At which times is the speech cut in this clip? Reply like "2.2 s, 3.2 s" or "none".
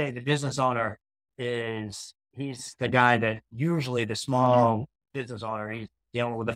none